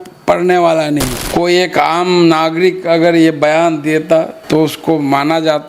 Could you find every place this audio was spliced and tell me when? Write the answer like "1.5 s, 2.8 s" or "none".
1.2 s, 4.4 s